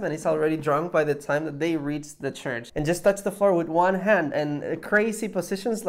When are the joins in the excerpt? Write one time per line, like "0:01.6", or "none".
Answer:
0:02.7